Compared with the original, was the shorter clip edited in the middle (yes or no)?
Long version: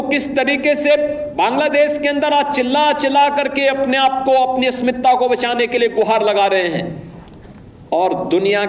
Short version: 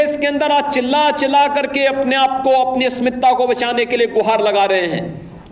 no